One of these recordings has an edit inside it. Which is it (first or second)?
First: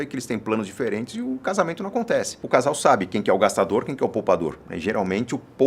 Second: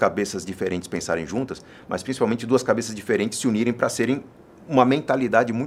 first